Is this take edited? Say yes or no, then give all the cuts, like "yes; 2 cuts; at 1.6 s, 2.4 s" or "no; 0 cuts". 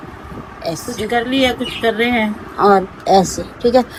no; 0 cuts